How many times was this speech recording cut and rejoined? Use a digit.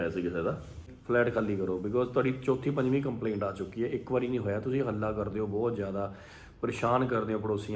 1